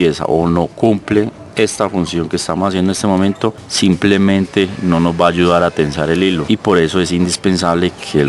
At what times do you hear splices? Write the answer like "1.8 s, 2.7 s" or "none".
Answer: 3.6 s, 6.4 s

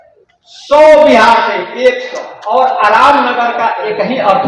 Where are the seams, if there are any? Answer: 2.3 s

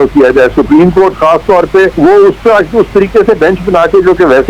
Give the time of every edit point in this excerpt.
1.9 s

